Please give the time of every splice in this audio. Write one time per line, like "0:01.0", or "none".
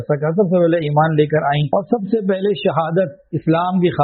0:01.6